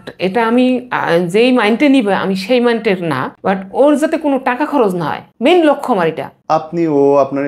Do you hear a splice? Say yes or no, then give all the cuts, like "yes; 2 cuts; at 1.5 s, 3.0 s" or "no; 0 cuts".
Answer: yes; 3 cuts; at 3.3 s, 5.2 s, 6.3 s